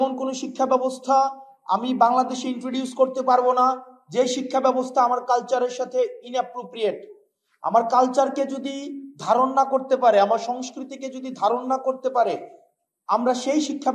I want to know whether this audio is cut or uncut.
uncut